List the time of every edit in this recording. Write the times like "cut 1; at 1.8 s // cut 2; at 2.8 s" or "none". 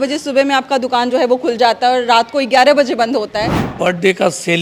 cut 1; at 3.7 s